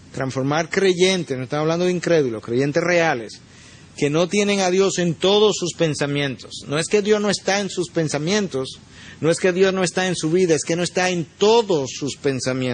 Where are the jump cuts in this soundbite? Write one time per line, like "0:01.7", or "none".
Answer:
0:08.1